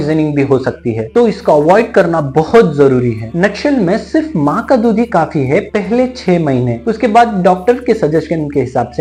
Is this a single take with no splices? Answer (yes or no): yes